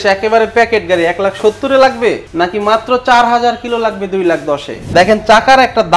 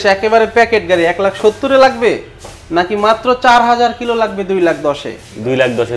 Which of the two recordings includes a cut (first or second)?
first